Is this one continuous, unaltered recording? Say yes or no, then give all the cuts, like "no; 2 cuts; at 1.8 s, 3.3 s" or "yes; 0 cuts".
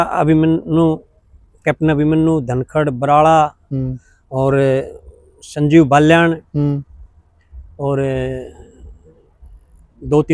yes; 0 cuts